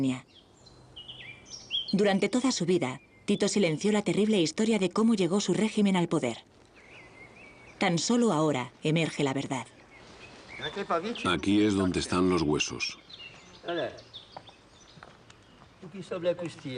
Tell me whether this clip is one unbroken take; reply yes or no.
yes